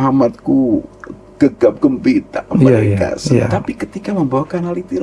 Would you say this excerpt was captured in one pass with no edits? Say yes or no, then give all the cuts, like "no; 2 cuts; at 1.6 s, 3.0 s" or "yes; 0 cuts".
yes; 0 cuts